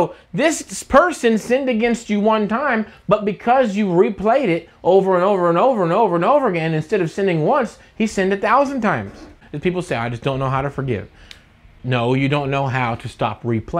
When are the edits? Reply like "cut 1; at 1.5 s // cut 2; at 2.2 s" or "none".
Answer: cut 1; at 9.4 s // cut 2; at 11.7 s